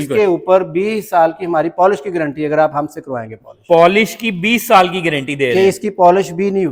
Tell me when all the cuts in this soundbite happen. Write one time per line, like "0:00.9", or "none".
none